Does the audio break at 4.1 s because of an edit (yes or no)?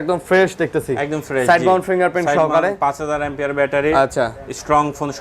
no